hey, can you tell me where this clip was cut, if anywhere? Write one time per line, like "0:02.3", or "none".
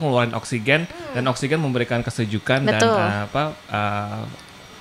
none